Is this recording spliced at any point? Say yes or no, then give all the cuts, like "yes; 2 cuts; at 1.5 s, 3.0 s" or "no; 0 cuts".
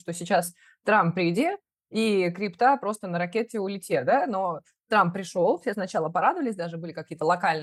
no; 0 cuts